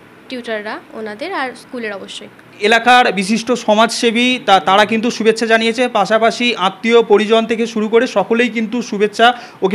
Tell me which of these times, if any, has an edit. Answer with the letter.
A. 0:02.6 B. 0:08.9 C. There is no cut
A